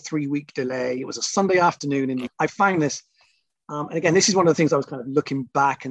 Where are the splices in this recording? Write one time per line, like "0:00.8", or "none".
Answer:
0:02.3